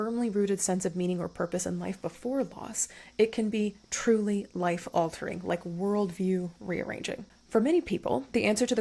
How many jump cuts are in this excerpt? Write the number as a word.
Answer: one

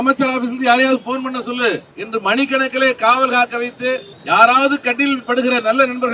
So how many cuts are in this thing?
two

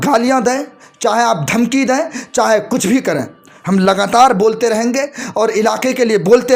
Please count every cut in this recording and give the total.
zero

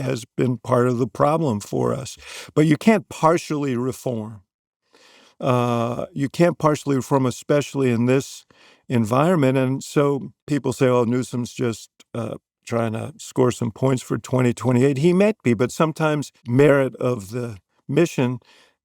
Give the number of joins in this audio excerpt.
two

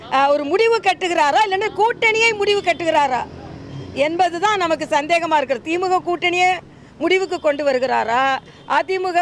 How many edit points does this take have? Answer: zero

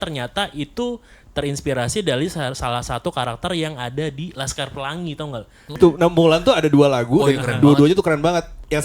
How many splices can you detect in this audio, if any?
one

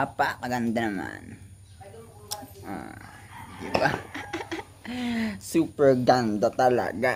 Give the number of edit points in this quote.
zero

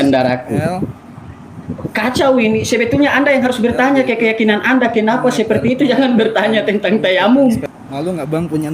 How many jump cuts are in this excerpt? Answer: one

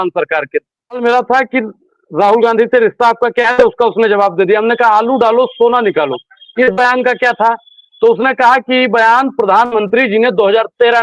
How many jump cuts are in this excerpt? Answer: one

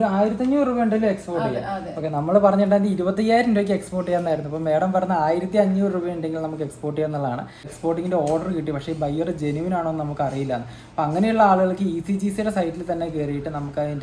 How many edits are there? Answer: one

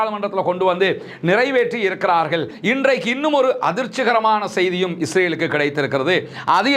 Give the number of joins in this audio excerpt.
one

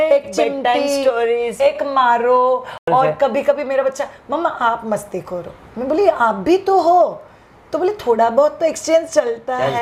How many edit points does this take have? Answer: zero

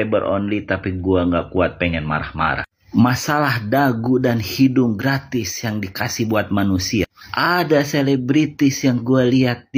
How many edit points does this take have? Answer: zero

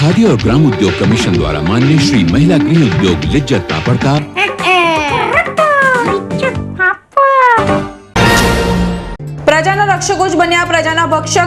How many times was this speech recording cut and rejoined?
one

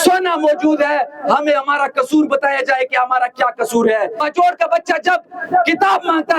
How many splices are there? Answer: one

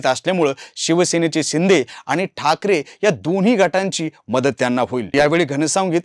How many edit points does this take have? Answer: one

